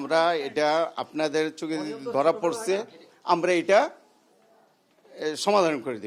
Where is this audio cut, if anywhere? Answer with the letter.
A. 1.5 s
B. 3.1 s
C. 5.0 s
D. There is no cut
D